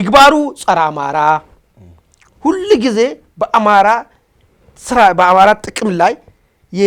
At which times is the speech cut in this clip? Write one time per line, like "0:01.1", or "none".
none